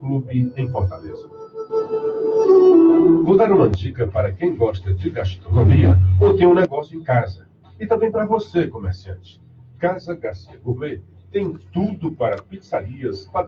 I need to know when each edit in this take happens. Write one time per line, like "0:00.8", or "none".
0:03.2

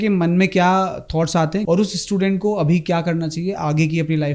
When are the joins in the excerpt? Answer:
0:01.6

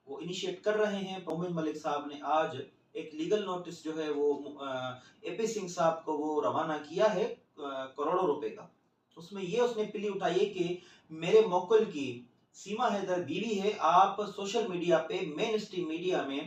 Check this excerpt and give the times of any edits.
0:01.3

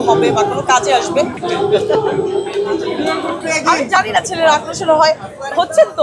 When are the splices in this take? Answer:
0:01.4
0:03.4

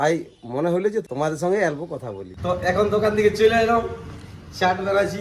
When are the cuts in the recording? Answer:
0:02.2

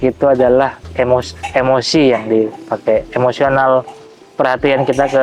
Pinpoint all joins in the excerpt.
none

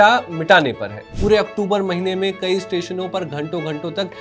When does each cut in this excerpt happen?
0:01.1

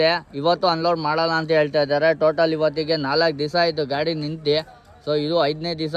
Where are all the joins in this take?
none

